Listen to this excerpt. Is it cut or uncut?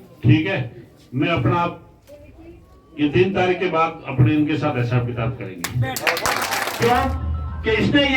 cut